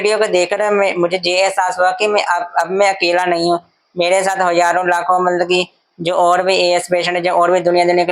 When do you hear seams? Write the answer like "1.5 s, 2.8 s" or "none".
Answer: none